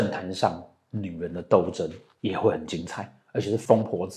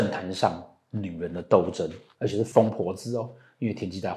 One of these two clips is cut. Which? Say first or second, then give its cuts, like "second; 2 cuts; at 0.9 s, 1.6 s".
second; 1 cut; at 2.0 s